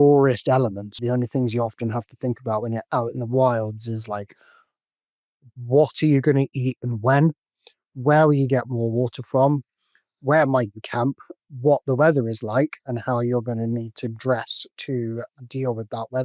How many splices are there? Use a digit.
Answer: 2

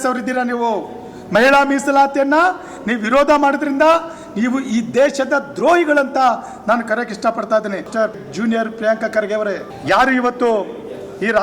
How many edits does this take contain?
2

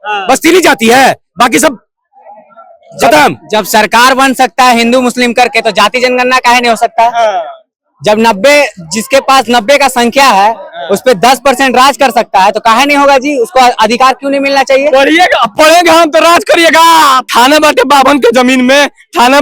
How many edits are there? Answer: 1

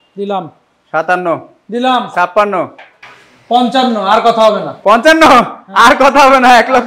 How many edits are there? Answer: 0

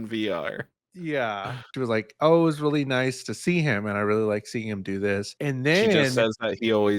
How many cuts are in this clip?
2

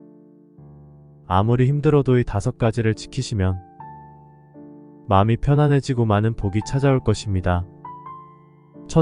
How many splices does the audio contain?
1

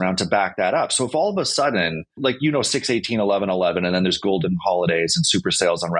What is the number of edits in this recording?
1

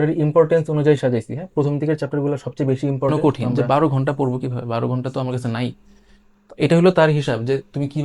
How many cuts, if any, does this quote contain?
1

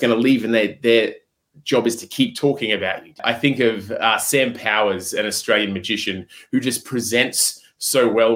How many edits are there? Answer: 1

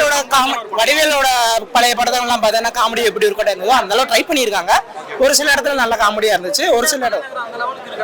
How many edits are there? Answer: 0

